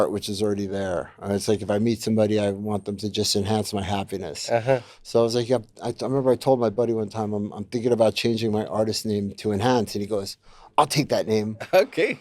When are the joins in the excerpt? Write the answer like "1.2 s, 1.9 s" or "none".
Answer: none